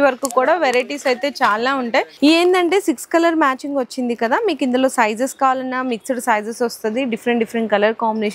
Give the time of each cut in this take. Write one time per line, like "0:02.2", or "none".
0:02.1